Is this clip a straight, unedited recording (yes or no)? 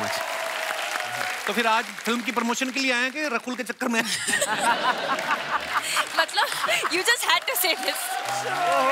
yes